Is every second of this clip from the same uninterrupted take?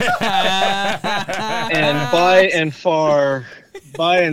yes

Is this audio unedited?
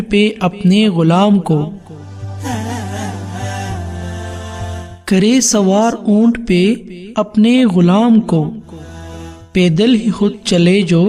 yes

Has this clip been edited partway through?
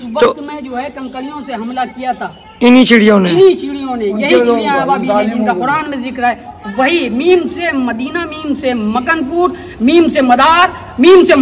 no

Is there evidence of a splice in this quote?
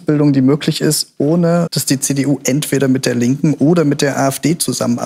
no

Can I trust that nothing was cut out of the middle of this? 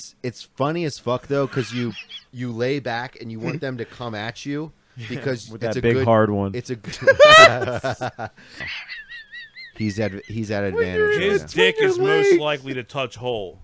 no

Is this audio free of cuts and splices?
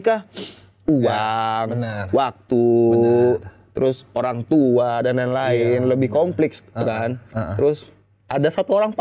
yes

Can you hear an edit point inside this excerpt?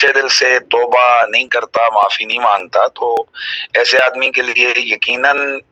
no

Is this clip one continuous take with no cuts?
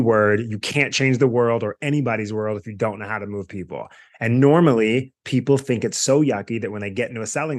yes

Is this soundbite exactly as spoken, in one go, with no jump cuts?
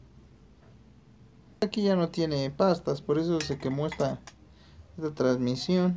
no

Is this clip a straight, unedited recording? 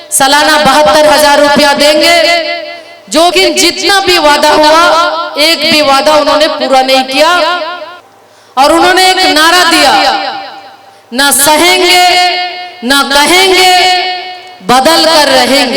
no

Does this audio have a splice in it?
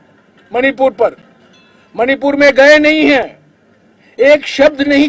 no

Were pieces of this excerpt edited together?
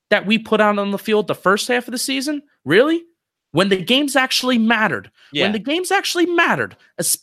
no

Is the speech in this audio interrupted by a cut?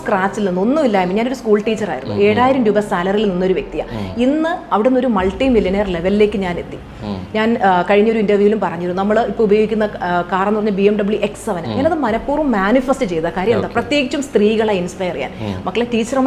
no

